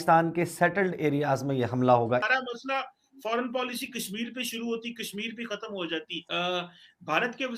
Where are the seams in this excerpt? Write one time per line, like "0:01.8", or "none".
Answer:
0:02.1
0:06.2